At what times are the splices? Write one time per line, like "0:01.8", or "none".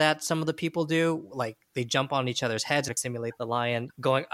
0:02.9